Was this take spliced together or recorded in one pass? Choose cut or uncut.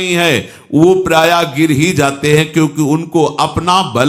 uncut